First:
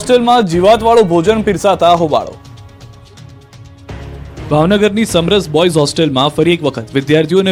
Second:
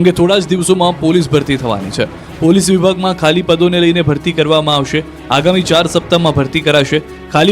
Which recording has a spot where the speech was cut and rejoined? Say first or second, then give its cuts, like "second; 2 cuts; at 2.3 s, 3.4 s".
second; 1 cut; at 5.8 s